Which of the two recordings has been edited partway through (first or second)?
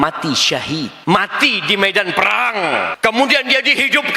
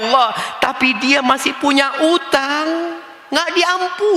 first